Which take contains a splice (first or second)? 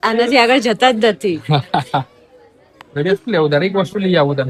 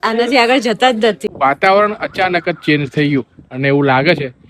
second